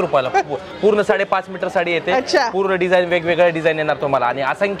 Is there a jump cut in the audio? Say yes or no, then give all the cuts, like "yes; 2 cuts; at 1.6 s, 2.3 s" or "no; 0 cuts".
no; 0 cuts